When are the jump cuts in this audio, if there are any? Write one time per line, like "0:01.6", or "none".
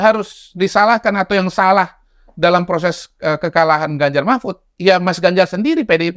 none